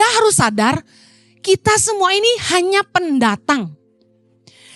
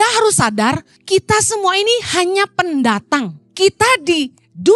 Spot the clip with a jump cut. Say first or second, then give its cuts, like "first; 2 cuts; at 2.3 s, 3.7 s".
second; 2 cuts; at 0.9 s, 3.4 s